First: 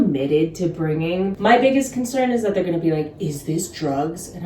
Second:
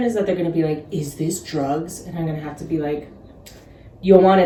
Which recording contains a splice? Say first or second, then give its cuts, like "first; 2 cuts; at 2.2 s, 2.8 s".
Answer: first; 1 cut; at 1.3 s